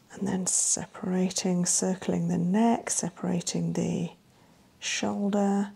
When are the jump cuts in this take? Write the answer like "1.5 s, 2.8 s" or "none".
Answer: none